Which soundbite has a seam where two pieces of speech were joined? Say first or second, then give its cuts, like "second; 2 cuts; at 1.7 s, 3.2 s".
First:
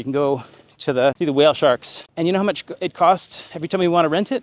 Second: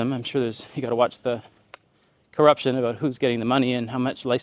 first; 2 cuts; at 1.2 s, 2.0 s